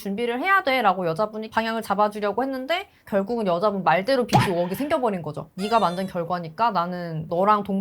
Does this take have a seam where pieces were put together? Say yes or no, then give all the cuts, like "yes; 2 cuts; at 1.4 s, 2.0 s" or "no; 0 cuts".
yes; 2 cuts; at 3.0 s, 5.4 s